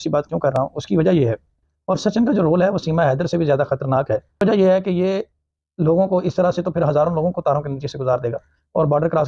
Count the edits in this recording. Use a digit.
2